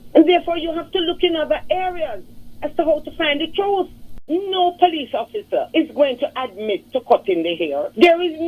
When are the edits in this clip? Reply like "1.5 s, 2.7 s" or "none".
4.2 s